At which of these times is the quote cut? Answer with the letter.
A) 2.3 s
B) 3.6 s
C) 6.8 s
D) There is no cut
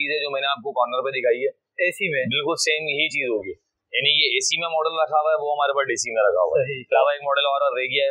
C